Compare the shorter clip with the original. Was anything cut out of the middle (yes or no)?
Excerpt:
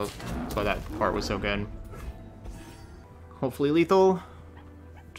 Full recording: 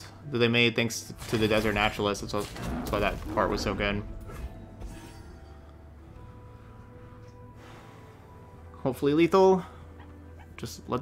yes